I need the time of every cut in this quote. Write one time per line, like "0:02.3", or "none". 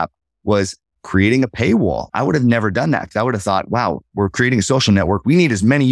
0:02.1

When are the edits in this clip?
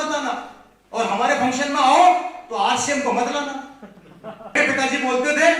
0:04.6

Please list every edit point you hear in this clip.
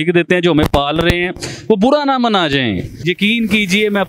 0:03.0

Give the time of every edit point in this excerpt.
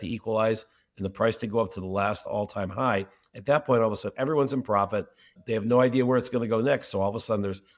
0:02.3
0:05.3

